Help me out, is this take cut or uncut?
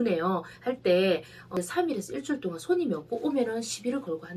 cut